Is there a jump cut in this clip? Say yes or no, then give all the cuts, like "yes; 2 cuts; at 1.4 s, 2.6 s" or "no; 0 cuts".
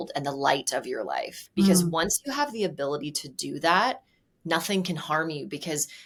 no; 0 cuts